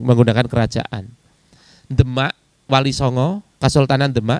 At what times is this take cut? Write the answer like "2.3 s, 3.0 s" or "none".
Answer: 3.5 s